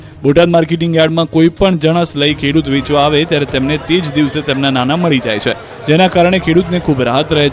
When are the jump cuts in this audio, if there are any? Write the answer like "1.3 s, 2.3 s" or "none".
none